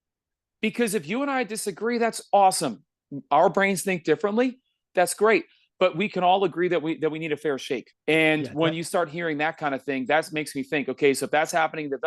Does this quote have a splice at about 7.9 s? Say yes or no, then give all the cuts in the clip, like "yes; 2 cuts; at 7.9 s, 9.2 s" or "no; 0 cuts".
yes; 1 cut; at 7.9 s